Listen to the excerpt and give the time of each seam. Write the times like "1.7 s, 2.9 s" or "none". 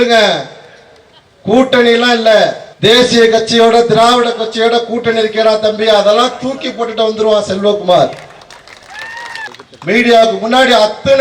2.7 s, 9.5 s